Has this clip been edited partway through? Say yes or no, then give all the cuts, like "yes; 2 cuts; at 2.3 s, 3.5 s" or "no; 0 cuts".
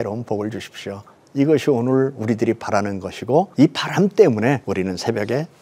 yes; 2 cuts; at 3.5 s, 4.6 s